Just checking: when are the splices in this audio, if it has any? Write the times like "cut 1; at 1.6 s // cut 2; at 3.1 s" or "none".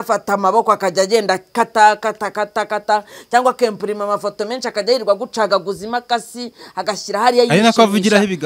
none